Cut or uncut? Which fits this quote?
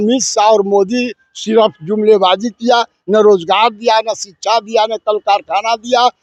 uncut